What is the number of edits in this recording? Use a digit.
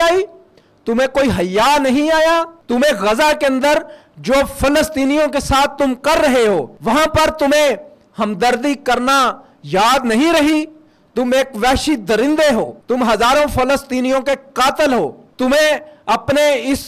4